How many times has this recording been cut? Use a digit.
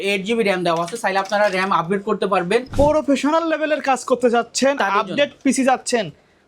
1